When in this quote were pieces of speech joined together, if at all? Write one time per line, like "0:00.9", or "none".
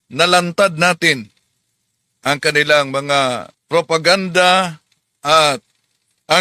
0:03.5